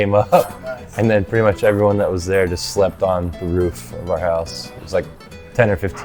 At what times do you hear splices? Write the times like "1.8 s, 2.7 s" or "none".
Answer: none